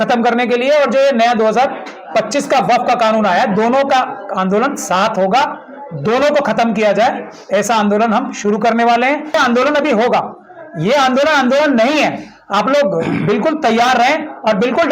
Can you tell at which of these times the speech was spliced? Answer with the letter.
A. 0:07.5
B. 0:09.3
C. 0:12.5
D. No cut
B